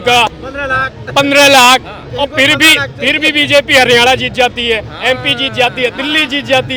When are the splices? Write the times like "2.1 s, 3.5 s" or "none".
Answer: none